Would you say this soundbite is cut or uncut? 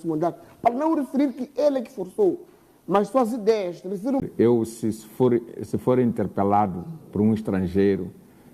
cut